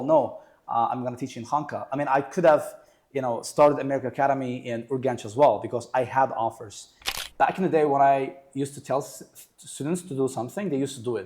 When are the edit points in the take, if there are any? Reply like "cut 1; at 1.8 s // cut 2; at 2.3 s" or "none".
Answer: cut 1; at 7.0 s